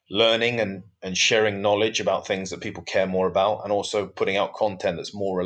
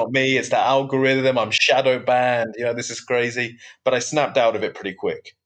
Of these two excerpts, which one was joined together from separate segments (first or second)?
second